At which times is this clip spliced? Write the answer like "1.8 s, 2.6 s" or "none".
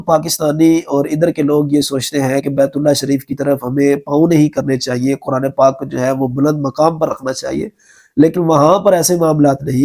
none

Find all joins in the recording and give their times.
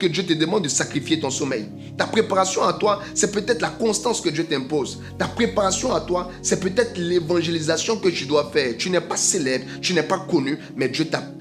none

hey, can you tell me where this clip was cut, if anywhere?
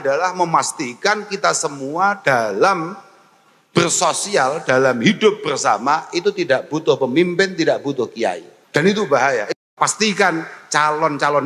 8.5 s, 9.6 s

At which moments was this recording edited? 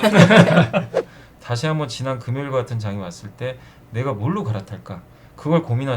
1.2 s

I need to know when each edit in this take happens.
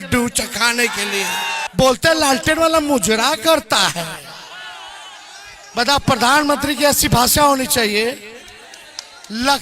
1.7 s

